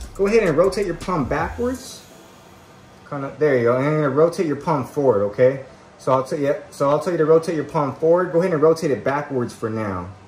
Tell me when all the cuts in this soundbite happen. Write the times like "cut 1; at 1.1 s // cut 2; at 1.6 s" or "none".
none

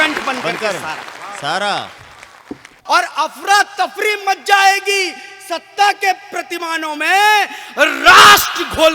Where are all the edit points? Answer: cut 1; at 2.7 s

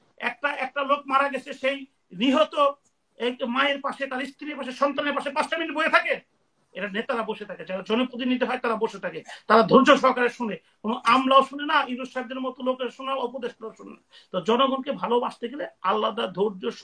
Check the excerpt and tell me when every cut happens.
none

